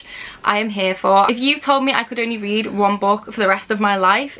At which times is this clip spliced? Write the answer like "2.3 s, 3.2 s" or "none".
1.3 s